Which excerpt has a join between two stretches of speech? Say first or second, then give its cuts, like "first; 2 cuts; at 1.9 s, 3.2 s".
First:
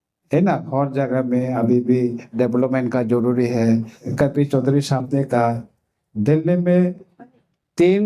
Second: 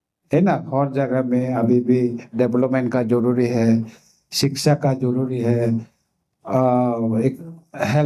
first; 1 cut; at 4.1 s